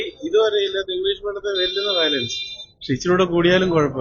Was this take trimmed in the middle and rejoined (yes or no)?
no